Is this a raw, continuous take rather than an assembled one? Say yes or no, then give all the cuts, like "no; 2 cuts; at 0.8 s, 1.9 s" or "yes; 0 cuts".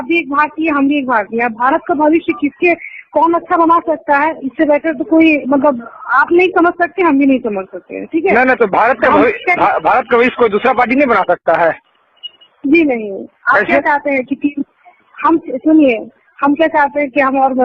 no; 1 cut; at 11.4 s